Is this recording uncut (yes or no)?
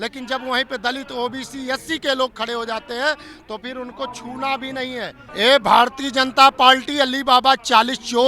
no